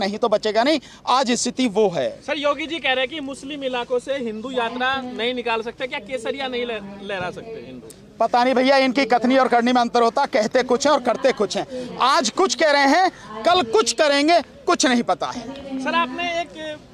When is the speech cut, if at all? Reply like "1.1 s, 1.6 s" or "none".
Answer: none